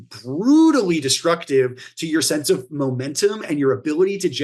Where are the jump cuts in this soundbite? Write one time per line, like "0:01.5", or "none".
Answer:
none